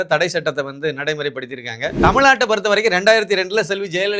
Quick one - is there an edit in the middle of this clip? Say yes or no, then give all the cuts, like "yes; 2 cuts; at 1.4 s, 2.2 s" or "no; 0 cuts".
yes; 1 cut; at 1.9 s